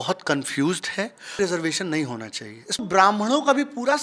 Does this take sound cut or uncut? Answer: cut